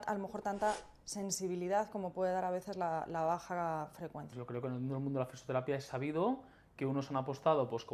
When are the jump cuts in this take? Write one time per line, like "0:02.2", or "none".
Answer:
0:04.3